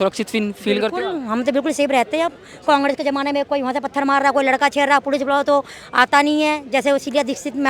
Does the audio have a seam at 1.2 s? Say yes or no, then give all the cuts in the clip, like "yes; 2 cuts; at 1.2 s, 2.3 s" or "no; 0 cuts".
no; 0 cuts